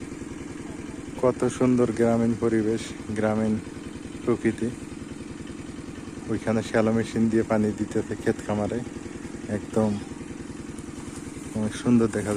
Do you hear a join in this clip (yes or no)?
no